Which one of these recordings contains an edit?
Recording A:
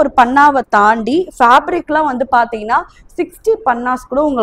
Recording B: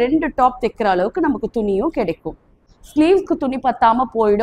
B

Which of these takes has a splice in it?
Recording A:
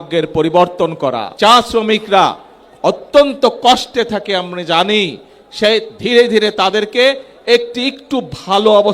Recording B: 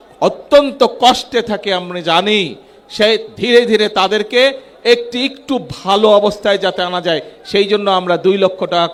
A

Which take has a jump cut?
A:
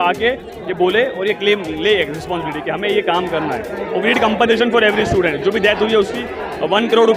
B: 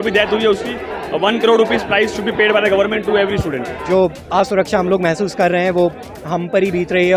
B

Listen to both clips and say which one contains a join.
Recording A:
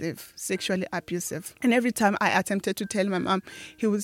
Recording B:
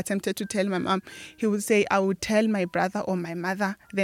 A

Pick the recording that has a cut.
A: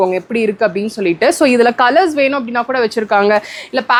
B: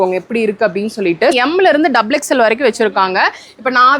B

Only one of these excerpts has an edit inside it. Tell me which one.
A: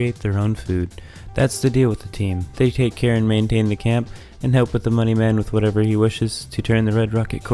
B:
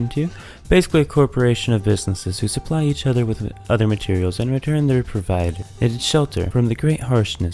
B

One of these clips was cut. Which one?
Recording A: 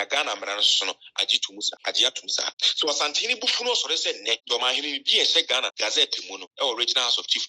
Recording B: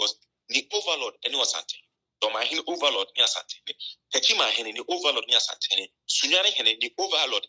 A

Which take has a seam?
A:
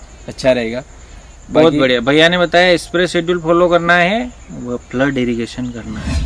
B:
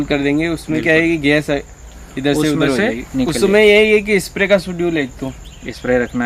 B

